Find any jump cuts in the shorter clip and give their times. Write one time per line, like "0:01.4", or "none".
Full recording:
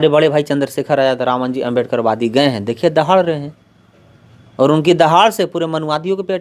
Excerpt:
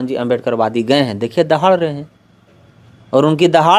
none